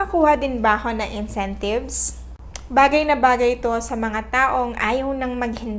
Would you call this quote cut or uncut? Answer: cut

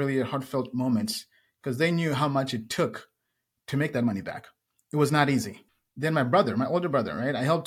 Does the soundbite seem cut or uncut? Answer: uncut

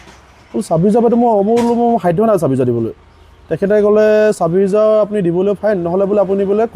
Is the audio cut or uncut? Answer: uncut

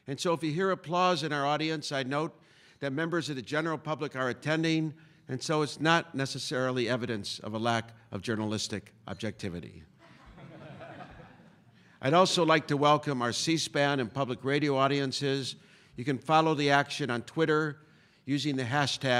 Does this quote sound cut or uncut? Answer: uncut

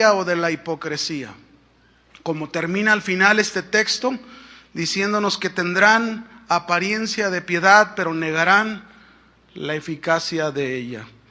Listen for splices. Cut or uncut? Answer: cut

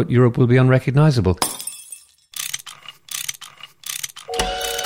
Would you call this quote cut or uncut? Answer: cut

